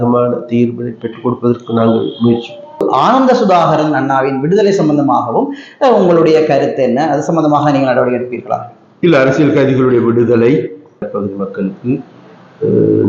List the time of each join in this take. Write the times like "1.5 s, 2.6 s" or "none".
2.8 s, 11.1 s